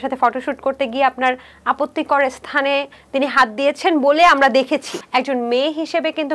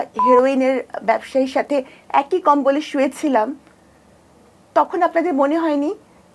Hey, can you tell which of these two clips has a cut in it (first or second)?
first